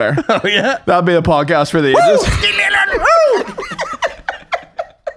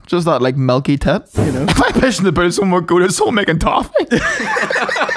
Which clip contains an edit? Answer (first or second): second